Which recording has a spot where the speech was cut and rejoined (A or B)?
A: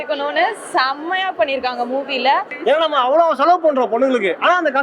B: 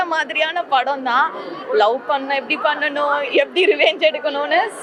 A